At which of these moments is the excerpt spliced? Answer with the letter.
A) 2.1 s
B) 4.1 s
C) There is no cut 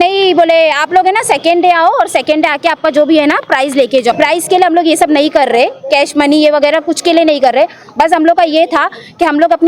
B